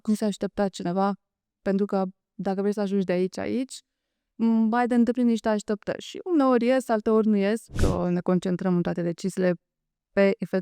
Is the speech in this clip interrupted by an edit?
yes; 1 cut; at 7.8 s

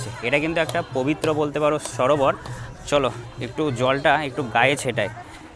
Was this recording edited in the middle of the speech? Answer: no; 0 cuts

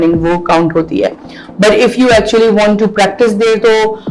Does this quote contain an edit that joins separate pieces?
no; 0 cuts

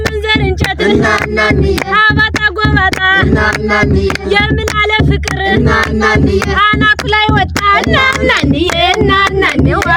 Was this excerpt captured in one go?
yes; 0 cuts

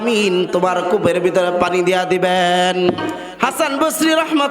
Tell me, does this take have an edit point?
yes; 1 cut; at 3.2 s

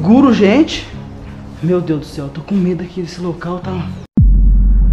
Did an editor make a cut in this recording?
yes; 1 cut; at 4.0 s

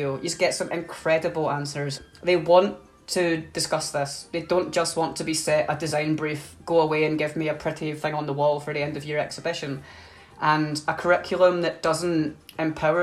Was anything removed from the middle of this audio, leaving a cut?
yes; 1 cut; at 1.8 s

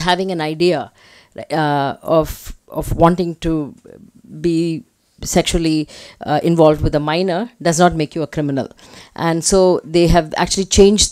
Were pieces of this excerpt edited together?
no; 0 cuts

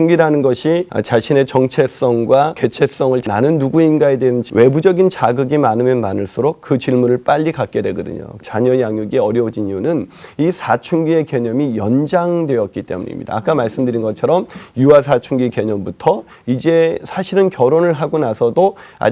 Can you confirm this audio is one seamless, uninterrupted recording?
no; 4 cuts; at 0.9 s, 2.9 s, 4.4 s, 8.4 s

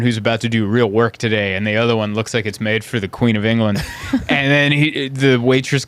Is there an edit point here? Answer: no; 0 cuts

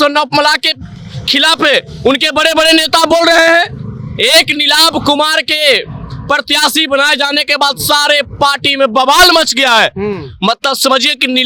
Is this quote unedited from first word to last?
yes; 0 cuts

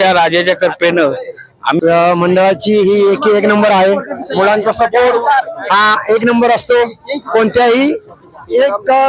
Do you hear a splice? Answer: yes; 1 cut; at 1.8 s

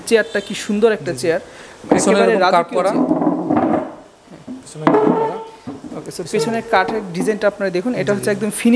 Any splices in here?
no; 0 cuts

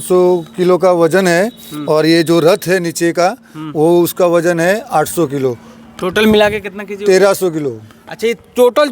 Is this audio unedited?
yes; 0 cuts

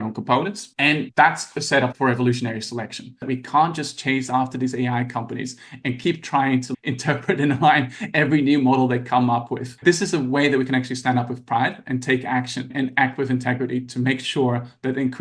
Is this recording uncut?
no; 2 cuts; at 3.2 s, 9.6 s

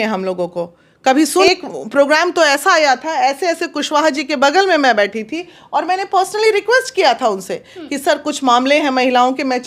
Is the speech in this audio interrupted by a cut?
yes; 1 cut; at 1.5 s

